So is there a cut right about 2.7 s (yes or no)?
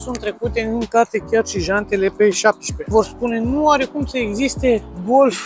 yes